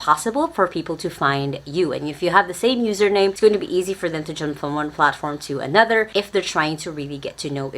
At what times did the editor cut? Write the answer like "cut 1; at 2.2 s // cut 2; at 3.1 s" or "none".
cut 1; at 3.4 s // cut 2; at 6.1 s